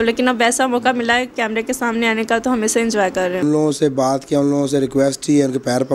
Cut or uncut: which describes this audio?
cut